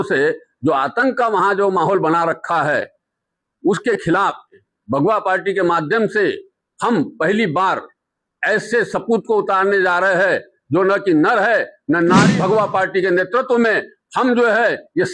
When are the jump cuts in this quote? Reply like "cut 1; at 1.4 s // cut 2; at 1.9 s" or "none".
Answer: cut 1; at 4.6 s // cut 2; at 12.3 s

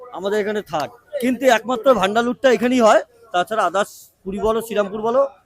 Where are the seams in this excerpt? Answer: cut 1; at 1.0 s

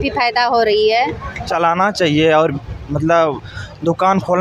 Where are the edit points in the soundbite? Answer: cut 1; at 1.5 s

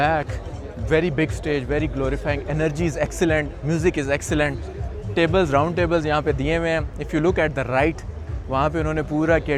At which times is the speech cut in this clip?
none

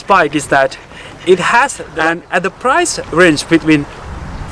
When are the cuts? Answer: cut 1; at 1.8 s

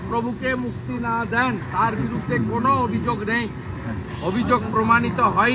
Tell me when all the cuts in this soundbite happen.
none

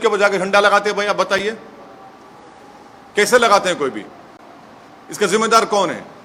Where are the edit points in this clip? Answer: none

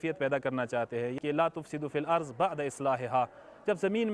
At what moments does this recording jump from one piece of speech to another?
cut 1; at 1.2 s

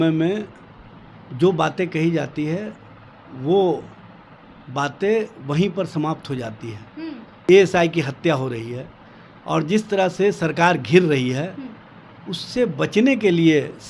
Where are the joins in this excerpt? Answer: cut 1; at 7.3 s

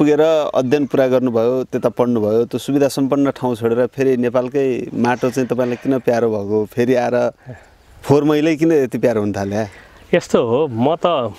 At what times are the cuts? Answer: none

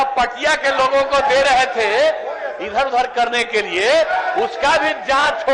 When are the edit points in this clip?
none

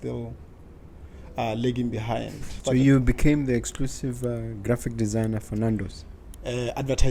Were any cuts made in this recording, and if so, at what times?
cut 1; at 2.5 s

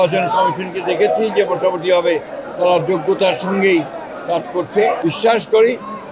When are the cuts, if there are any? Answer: cut 1; at 5.0 s

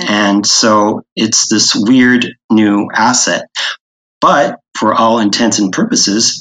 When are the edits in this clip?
none

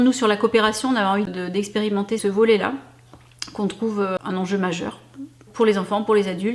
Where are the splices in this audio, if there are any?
cut 1; at 1.8 s // cut 2; at 4.2 s // cut 3; at 5.5 s

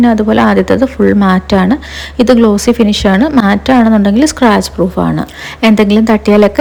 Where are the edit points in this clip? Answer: none

